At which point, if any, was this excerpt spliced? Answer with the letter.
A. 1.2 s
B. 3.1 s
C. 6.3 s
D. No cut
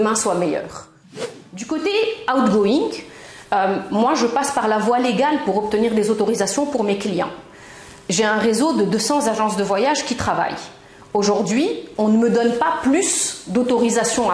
A